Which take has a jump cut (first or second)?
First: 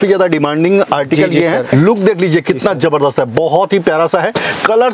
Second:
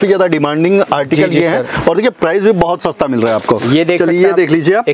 first